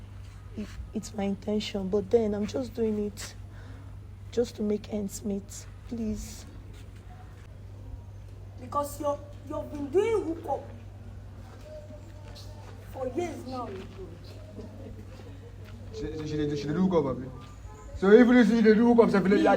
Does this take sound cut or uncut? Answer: cut